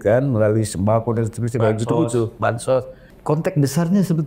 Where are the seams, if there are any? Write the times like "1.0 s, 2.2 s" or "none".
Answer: 3.1 s